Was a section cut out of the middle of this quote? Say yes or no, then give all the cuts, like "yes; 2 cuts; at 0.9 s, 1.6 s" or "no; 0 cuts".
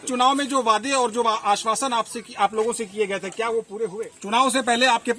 yes; 1 cut; at 4.1 s